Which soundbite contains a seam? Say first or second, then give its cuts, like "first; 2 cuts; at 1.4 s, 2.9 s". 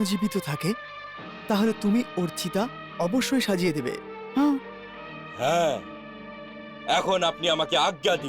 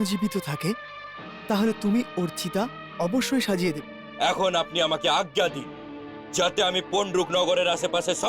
second; 1 cut; at 3.9 s